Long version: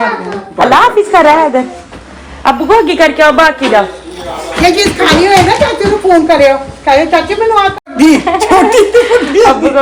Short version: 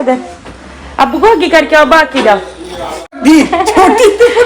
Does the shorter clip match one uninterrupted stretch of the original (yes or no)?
no